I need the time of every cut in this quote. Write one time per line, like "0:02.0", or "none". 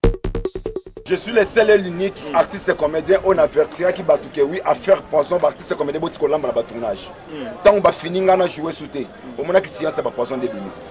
0:00.9